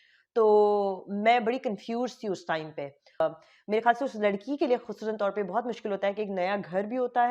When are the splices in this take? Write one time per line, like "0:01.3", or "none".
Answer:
0:03.2